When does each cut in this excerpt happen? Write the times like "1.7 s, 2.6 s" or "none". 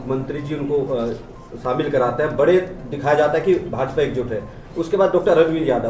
none